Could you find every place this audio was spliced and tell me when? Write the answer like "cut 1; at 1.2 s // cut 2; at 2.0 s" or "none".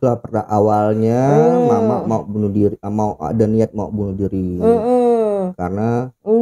none

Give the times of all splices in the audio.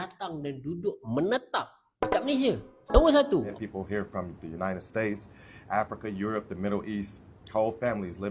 cut 1; at 3.6 s

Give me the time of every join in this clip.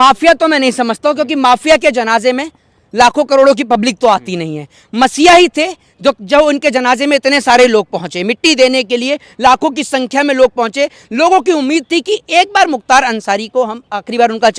none

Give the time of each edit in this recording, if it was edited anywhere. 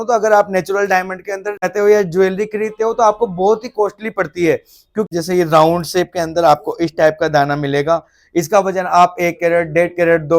cut 1; at 1.7 s // cut 2; at 5.1 s

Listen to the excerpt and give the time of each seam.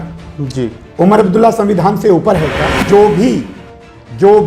cut 1; at 2.8 s

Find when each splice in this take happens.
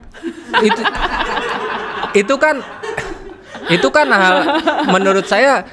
none

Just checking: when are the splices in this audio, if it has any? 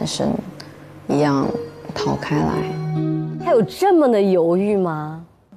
cut 1; at 3.3 s

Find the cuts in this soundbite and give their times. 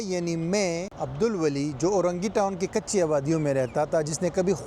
cut 1; at 0.9 s

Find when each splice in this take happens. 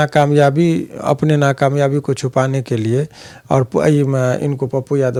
none

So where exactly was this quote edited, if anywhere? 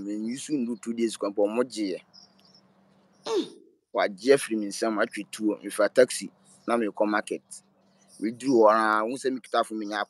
none

